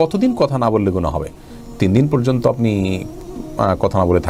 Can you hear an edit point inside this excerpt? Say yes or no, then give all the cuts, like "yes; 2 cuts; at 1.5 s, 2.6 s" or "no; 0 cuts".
no; 0 cuts